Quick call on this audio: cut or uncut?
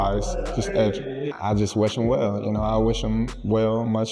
cut